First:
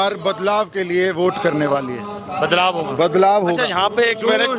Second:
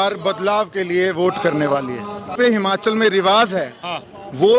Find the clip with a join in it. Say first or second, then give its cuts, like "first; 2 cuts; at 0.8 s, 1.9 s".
second; 1 cut; at 2.3 s